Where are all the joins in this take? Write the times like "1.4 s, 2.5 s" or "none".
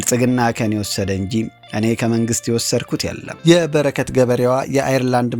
3.3 s